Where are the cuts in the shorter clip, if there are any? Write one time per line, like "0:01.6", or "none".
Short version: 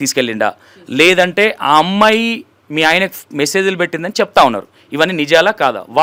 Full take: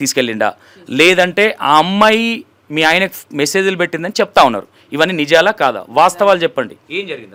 none